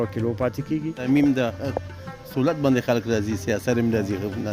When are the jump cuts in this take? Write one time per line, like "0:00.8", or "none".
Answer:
0:01.0